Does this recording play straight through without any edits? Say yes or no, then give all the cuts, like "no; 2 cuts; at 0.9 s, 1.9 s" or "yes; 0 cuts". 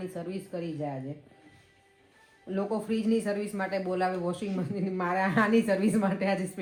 yes; 0 cuts